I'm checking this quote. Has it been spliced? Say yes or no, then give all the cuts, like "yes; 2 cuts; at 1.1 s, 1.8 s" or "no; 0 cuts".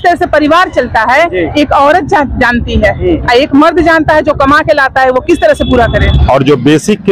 yes; 1 cut; at 6.2 s